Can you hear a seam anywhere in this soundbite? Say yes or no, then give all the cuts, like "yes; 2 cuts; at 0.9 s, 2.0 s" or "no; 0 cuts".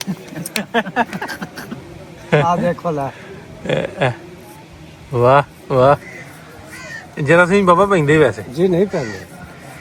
no; 0 cuts